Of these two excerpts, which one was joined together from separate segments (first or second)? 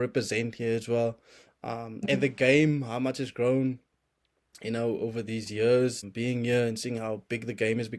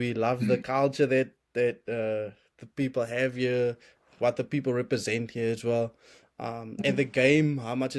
first